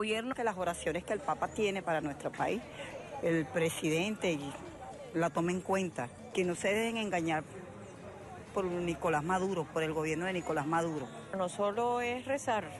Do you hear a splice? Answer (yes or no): yes